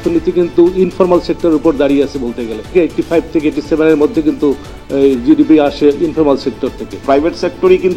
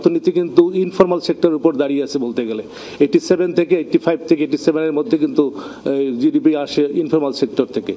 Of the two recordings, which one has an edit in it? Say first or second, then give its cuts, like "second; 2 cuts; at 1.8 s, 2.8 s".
first; 2 cuts; at 2.7 s, 7.0 s